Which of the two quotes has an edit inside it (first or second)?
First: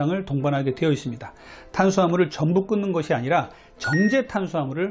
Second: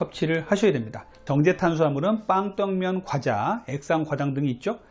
second